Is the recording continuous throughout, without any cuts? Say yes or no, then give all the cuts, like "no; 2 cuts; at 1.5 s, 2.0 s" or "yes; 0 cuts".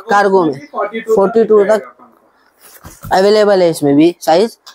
yes; 0 cuts